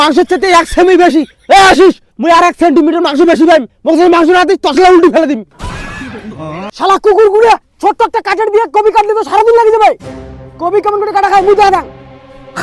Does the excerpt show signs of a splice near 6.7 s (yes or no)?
yes